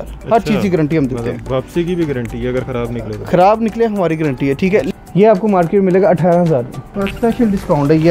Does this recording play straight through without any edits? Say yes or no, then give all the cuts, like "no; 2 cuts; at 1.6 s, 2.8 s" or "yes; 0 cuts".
no; 2 cuts; at 4.9 s, 7.0 s